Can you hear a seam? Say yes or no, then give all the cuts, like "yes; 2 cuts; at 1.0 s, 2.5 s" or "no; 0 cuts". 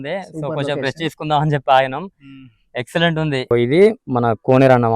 yes; 1 cut; at 3.5 s